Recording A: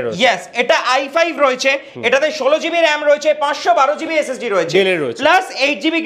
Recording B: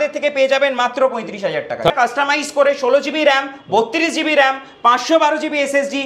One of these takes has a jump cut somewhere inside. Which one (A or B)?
B